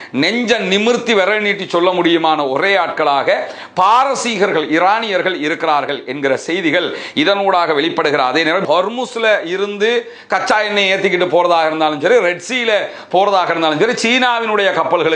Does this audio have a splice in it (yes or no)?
yes